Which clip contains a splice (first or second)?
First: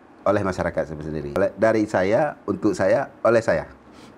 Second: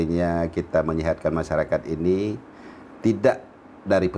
first